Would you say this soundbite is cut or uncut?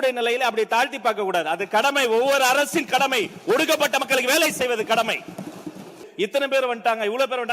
cut